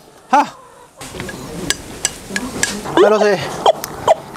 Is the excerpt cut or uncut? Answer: cut